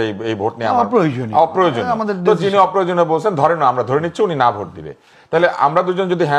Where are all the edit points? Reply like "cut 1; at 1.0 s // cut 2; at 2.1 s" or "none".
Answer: none

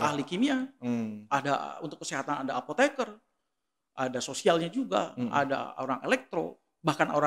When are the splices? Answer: none

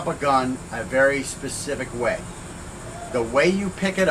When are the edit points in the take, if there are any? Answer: none

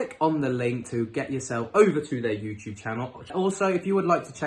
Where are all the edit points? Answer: cut 1; at 3.3 s

